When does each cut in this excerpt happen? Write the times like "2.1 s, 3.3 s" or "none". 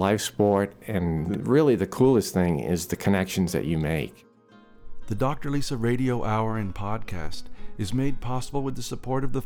1.3 s, 4.2 s